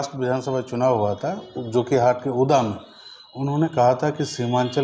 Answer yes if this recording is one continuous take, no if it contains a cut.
yes